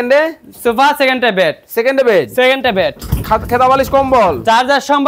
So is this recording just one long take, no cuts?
yes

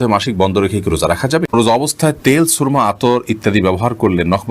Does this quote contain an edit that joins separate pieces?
yes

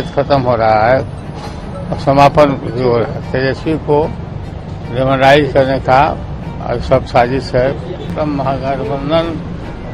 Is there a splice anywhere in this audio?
yes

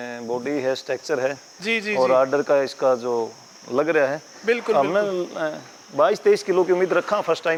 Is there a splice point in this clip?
no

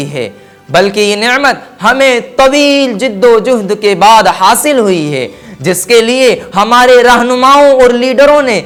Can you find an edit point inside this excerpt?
no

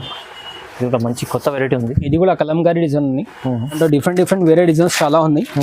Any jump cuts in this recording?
yes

